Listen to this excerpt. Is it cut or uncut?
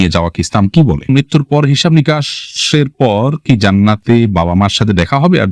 cut